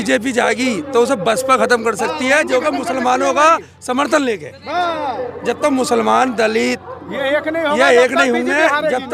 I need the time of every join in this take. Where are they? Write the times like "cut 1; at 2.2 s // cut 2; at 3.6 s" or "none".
none